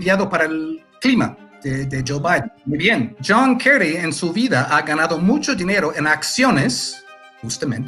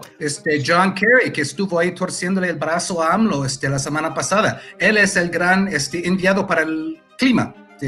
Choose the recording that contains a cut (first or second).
first